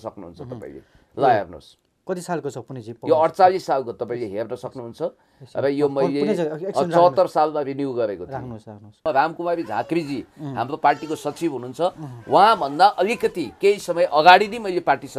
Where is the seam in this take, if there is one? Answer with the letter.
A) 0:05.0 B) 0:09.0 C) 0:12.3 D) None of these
B